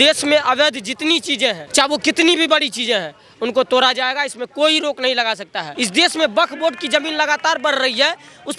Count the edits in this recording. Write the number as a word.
two